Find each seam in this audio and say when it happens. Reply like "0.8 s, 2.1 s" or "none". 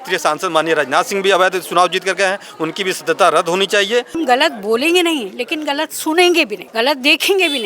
4.1 s, 6.6 s